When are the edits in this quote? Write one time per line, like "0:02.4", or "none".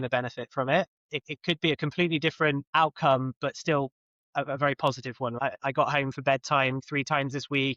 0:01.0
0:02.6
0:05.3
0:06.8